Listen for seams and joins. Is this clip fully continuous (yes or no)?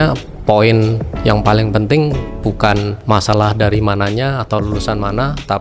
no